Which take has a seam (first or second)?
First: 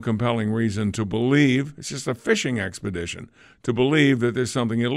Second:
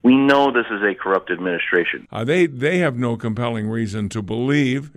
second